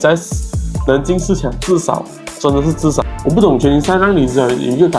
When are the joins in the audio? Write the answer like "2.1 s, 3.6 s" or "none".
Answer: 3.1 s